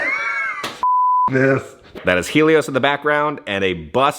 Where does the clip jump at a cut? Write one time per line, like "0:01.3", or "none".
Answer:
0:01.9

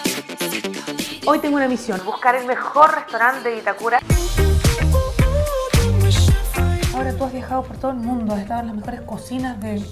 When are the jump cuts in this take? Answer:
0:01.1
0:04.0

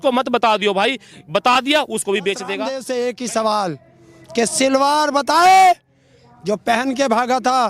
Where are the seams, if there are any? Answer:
0:02.7

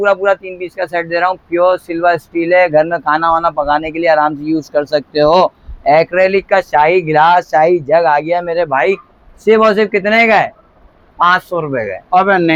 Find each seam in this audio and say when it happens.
none

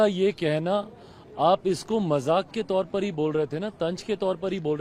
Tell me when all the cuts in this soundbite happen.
none

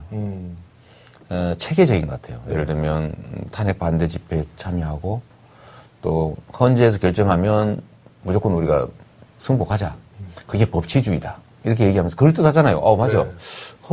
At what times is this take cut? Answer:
0:04.1

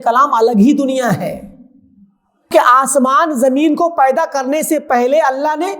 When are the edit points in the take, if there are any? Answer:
0:02.5

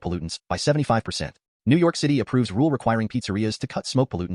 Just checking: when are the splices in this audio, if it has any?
none

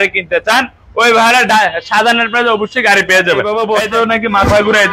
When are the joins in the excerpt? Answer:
0:03.4

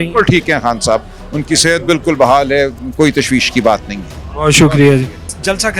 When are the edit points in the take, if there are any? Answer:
none

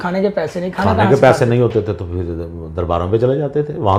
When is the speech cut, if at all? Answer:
none

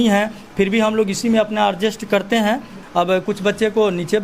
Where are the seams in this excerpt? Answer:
0:02.8

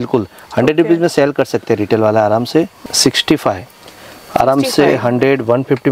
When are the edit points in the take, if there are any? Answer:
0:02.8

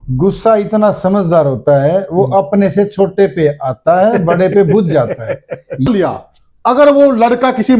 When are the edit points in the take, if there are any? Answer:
0:05.9

